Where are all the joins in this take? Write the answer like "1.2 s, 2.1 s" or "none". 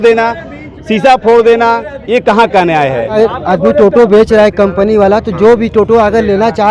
3.1 s